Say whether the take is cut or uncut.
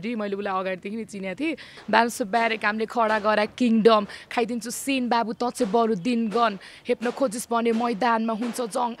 cut